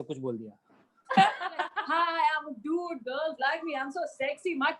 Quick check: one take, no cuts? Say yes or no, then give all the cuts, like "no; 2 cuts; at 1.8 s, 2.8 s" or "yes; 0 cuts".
no; 1 cut; at 1.8 s